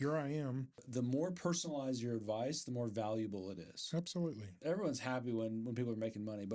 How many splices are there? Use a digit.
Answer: 2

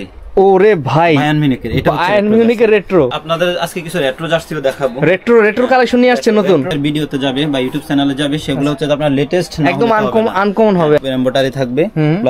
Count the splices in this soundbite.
3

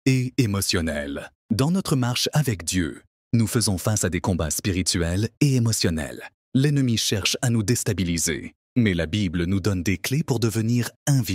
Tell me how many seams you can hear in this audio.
1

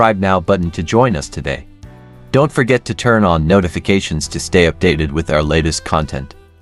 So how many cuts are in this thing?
0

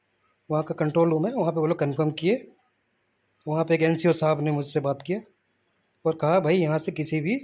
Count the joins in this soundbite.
0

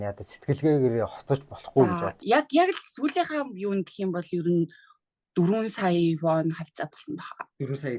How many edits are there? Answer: 1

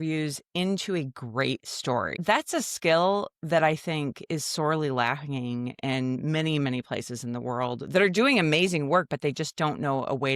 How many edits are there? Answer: 1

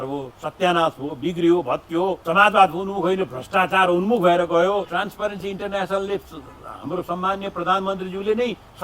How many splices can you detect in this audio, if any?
2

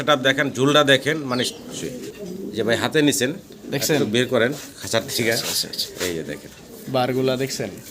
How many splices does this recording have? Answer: 1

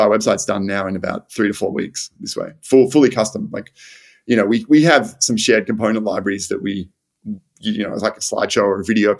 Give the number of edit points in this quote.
0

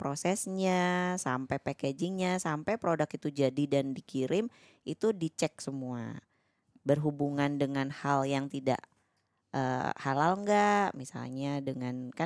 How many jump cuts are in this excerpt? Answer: 0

